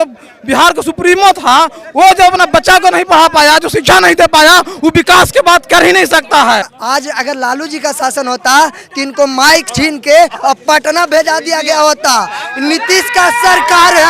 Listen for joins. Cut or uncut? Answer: cut